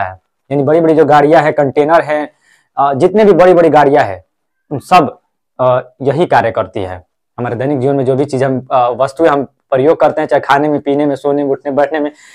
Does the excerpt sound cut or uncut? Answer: uncut